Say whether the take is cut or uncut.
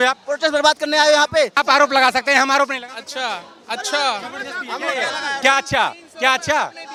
uncut